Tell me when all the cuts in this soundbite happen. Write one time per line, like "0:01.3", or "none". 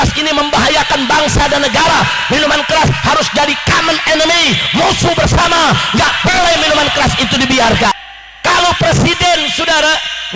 0:07.9